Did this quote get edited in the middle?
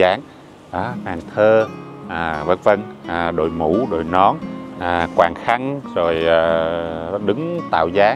no; 0 cuts

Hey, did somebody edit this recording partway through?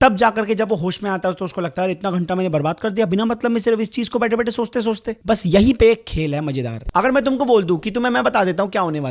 yes; 1 cut; at 6.8 s

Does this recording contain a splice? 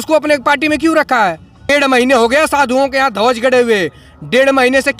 yes; 1 cut; at 1.7 s

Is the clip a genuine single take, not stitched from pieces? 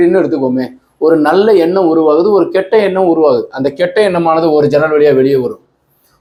yes; 0 cuts

